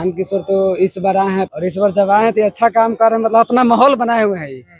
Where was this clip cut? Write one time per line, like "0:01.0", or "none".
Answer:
0:01.5